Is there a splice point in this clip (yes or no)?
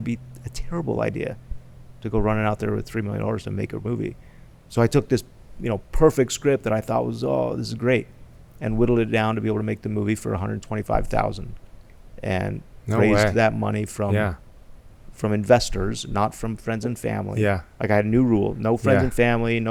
no